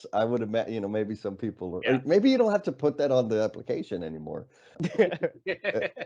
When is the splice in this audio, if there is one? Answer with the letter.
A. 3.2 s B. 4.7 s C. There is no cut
B